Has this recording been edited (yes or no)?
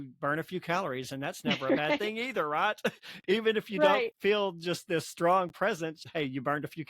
yes